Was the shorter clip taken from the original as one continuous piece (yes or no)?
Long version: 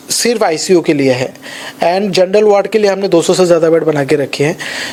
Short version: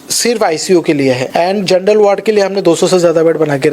no